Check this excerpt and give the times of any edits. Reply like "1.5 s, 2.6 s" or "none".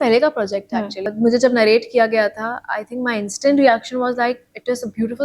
1.1 s